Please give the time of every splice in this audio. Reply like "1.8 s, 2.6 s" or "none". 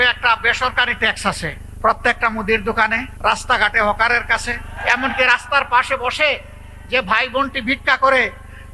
1.6 s, 3.1 s, 4.7 s